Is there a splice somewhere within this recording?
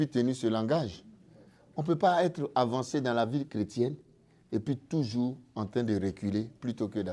no; 0 cuts

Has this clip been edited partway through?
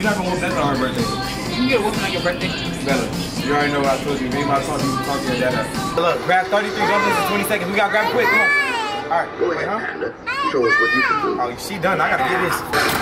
yes; 1 cut; at 6.0 s

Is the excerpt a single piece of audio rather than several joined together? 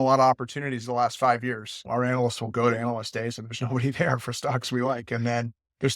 no; 1 cut; at 1.8 s

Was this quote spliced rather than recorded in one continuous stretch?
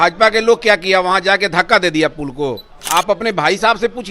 yes; 1 cut; at 2.8 s

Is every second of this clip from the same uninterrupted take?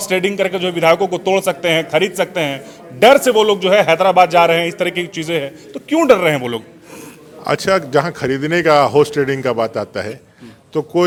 yes; 0 cuts

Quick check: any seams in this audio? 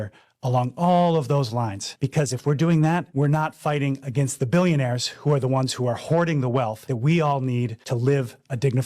no; 0 cuts

